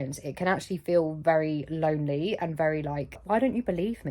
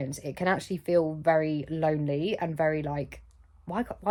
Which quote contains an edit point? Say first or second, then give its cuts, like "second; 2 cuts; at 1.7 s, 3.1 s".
first; 1 cut; at 3.2 s